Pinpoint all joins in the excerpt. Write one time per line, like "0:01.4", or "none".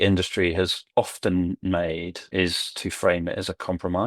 0:02.3

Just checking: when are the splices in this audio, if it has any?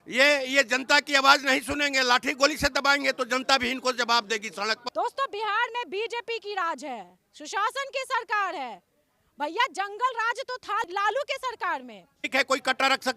0:04.8
0:10.9
0:12.2

